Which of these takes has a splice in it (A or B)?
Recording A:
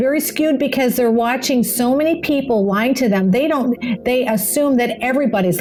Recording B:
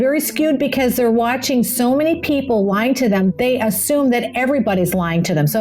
B